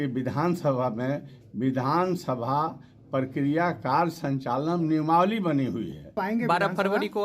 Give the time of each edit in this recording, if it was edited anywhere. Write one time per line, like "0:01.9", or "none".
0:06.2